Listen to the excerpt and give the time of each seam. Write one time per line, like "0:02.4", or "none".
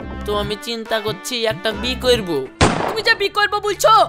0:02.6